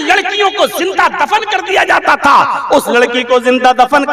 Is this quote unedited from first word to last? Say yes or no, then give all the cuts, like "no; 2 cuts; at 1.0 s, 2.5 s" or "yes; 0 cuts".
yes; 0 cuts